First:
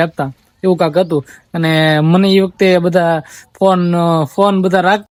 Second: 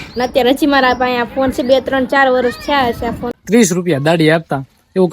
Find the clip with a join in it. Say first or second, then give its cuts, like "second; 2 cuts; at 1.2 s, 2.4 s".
second; 1 cut; at 3.4 s